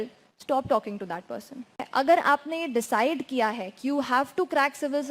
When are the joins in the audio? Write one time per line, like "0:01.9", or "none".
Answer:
0:01.9